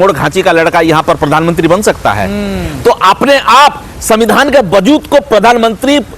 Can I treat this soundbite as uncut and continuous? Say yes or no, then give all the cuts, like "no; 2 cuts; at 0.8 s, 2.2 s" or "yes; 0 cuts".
yes; 0 cuts